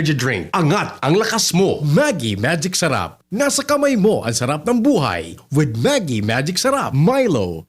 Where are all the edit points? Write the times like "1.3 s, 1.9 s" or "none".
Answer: 1.8 s, 6.9 s